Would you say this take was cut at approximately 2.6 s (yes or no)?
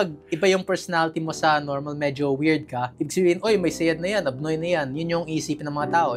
no